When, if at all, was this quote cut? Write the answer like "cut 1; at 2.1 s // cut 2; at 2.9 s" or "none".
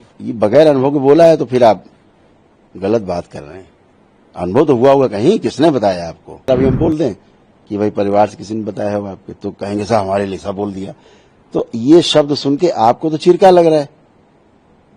cut 1; at 6.5 s